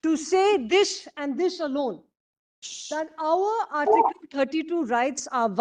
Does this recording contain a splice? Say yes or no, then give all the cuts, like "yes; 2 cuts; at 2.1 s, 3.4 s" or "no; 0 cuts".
no; 0 cuts